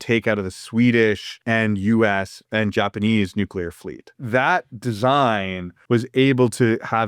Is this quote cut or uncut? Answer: cut